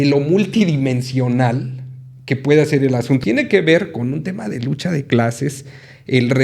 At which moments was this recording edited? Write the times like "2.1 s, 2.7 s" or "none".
3.2 s